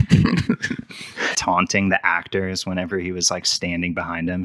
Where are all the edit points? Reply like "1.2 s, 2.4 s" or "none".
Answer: 1.3 s